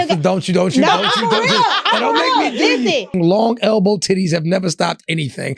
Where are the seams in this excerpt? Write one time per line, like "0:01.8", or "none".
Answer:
0:03.1